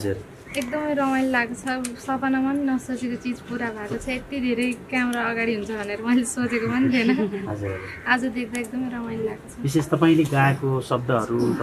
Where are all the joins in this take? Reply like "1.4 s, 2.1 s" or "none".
none